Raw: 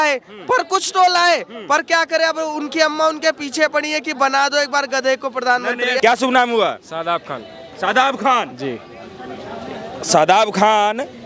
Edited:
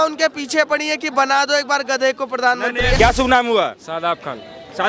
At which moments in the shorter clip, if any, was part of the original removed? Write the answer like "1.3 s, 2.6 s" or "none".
none